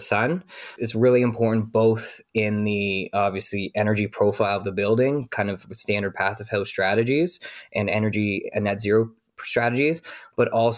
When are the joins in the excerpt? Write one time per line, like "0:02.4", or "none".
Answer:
none

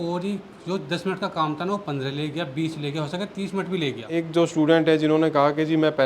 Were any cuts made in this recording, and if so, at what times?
0:04.1

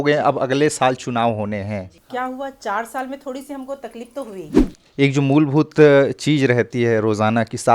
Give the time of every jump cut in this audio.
0:02.0
0:04.6

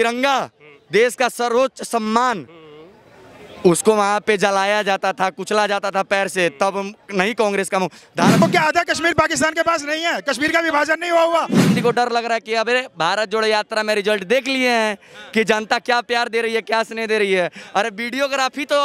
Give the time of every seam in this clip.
0:08.4
0:11.7

